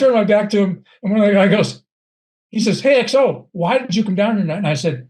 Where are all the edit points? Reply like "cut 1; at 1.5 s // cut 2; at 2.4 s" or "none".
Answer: cut 1; at 3.5 s